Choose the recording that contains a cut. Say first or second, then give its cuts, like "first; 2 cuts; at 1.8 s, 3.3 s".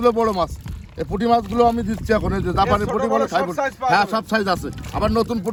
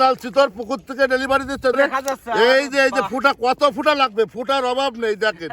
second; 1 cut; at 1.7 s